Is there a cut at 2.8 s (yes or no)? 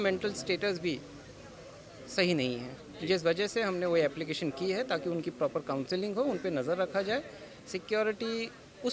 no